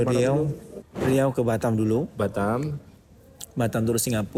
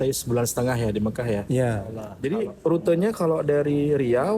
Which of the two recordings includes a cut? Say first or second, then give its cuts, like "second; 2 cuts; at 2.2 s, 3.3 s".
second; 1 cut; at 2.1 s